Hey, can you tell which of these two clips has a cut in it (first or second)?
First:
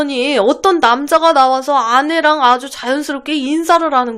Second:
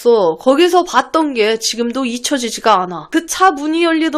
second